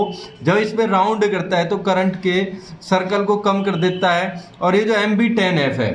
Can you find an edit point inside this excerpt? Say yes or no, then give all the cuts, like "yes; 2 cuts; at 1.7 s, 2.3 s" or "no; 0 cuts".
no; 0 cuts